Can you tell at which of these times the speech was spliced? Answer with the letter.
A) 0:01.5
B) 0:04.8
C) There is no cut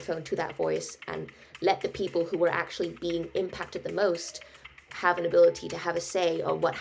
B